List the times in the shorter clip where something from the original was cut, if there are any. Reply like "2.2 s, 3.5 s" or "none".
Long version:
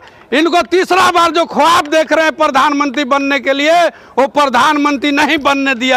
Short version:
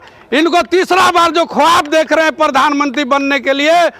none